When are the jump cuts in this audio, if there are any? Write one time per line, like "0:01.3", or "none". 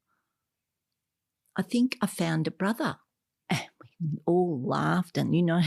none